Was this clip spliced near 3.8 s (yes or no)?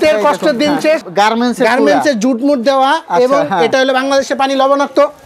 no